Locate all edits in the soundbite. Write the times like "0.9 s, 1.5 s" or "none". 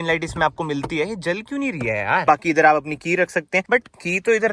2.3 s, 3.6 s